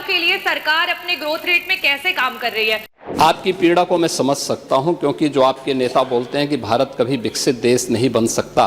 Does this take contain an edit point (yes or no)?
yes